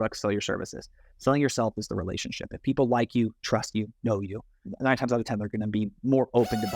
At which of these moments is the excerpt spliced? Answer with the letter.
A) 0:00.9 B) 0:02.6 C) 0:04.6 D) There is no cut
C